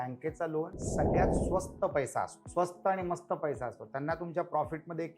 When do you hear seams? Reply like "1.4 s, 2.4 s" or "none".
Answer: 2.4 s